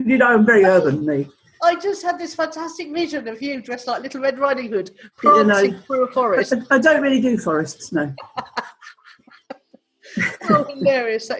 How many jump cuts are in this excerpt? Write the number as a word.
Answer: zero